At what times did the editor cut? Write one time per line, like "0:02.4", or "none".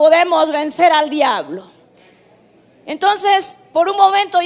0:02.7